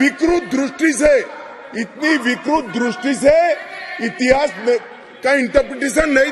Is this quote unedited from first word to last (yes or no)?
yes